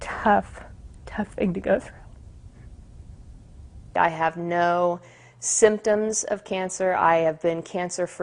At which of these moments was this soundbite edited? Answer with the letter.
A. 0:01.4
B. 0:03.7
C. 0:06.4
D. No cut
B